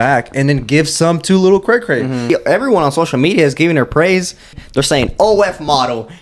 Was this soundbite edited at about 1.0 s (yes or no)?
no